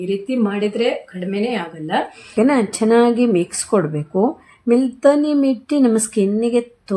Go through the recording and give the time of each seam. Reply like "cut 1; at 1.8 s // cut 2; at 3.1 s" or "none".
cut 1; at 2.3 s